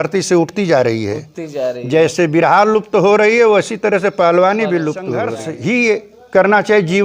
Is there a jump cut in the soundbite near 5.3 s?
yes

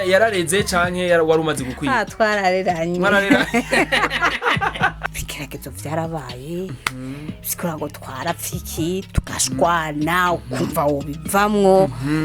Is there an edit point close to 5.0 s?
yes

